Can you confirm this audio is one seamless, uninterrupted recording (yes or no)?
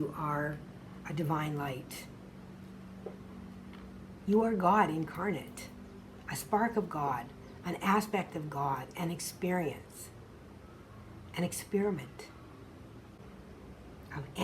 no